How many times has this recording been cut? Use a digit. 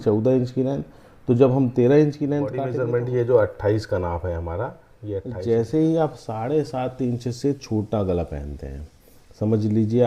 2